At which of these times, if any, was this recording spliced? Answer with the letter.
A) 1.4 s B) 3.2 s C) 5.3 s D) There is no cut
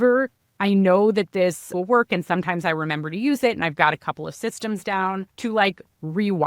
C